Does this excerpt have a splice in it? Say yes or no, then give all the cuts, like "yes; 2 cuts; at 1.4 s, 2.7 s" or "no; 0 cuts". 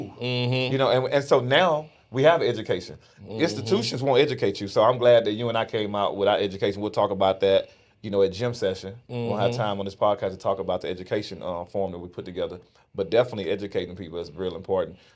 no; 0 cuts